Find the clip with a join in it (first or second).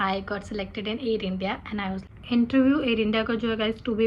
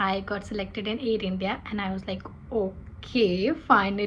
first